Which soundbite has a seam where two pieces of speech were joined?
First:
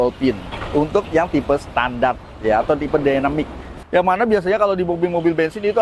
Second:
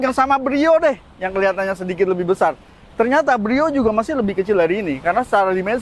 first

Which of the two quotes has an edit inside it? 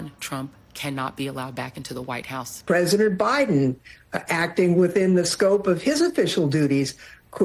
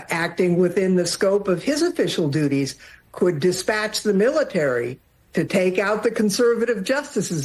first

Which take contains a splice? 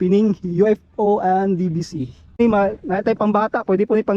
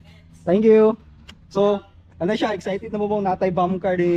first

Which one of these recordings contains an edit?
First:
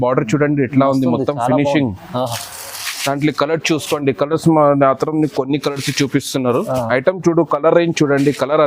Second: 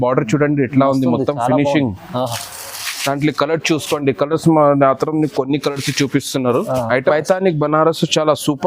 second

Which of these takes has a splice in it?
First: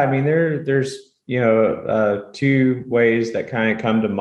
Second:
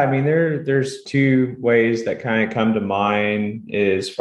second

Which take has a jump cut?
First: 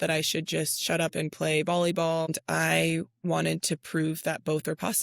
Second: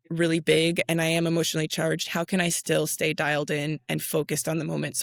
first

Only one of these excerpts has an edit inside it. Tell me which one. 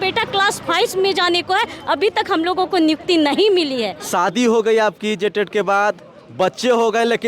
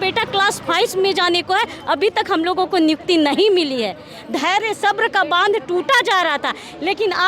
first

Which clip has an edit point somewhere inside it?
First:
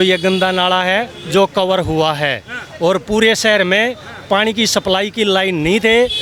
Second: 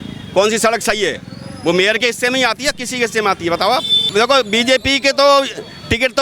second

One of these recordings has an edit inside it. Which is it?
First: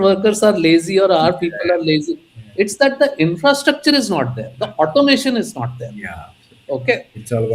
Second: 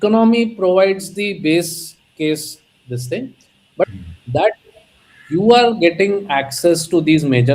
second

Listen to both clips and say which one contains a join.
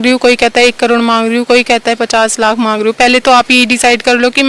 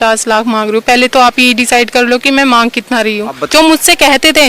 second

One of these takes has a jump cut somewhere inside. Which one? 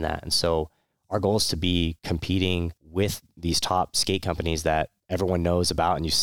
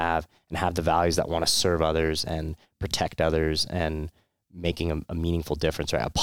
first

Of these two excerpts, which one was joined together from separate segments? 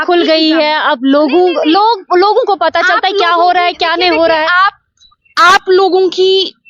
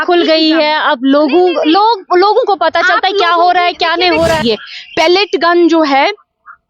second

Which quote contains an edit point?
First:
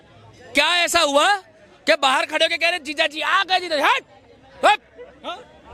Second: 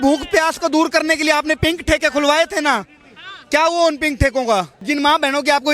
second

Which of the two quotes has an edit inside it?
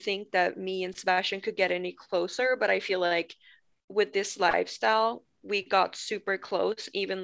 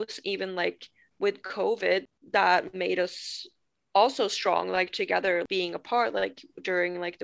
second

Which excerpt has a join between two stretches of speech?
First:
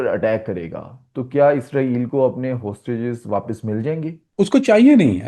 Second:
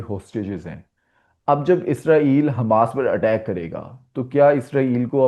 first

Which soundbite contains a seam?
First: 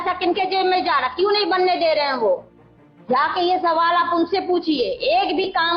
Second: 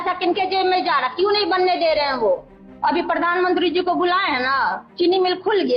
second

